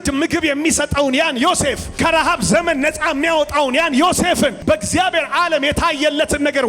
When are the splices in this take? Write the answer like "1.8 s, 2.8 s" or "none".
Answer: 1.9 s, 4.6 s